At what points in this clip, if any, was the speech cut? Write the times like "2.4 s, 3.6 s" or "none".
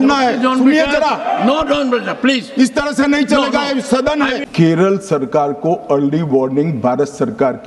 4.4 s